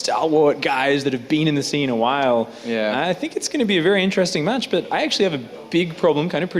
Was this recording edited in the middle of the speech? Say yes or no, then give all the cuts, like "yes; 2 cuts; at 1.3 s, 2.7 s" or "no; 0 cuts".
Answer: yes; 1 cut; at 4.6 s